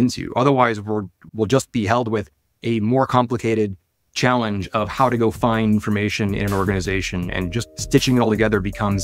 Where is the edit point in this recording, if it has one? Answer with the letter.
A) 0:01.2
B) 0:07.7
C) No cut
A